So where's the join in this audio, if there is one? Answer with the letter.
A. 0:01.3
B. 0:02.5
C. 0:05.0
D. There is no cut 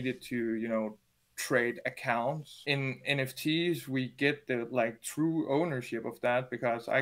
B